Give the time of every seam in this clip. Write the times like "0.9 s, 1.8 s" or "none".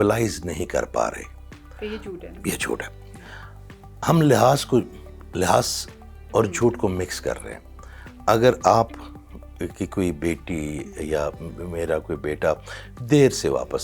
none